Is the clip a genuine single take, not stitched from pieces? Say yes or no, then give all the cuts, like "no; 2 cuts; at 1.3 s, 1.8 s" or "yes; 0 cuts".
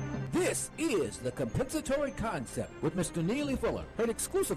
yes; 0 cuts